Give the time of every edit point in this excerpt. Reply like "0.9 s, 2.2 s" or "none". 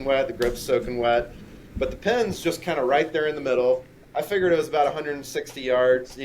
4.0 s